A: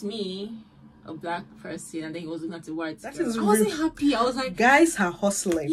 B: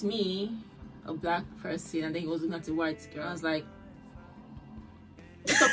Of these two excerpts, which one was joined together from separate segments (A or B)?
A